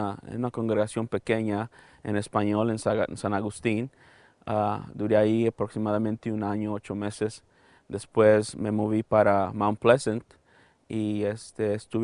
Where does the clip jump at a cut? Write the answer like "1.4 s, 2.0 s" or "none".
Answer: 8.5 s